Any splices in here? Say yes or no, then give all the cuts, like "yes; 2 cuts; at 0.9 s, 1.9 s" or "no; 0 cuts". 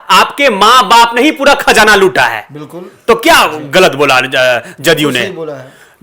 no; 0 cuts